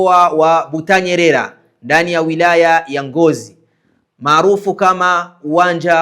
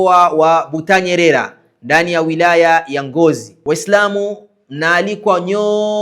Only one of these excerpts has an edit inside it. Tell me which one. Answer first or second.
second